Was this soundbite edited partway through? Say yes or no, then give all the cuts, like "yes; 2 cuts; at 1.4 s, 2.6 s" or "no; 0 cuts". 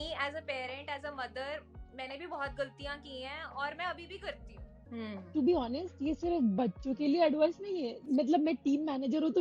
yes; 2 cuts; at 4.8 s, 8.0 s